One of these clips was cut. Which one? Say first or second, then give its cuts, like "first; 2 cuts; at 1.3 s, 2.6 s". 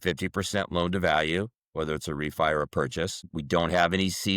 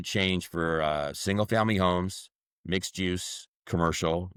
first; 1 cut; at 3.3 s